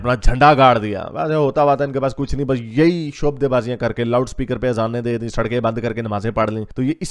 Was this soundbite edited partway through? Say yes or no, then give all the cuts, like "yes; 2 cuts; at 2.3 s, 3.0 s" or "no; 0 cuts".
no; 0 cuts